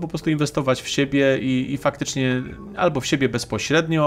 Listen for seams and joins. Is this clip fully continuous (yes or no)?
yes